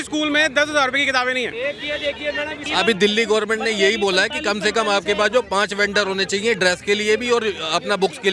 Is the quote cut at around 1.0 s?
no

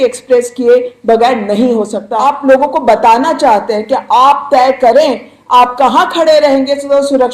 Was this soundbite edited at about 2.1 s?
yes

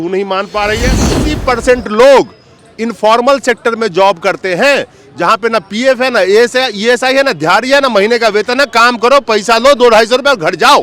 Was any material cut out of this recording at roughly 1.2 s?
yes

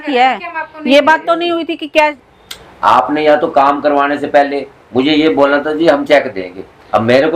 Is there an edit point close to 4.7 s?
no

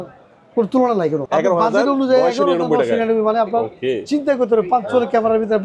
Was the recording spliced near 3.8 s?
no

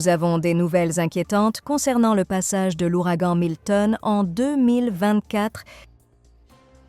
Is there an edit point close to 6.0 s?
yes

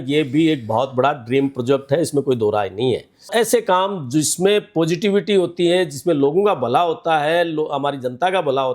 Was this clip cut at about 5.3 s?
no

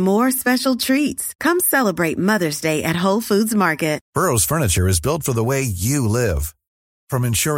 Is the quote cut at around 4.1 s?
yes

